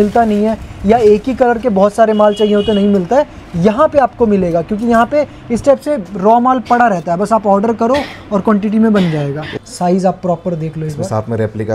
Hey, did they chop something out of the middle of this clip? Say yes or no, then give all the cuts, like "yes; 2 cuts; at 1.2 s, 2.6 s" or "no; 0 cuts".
yes; 1 cut; at 9.5 s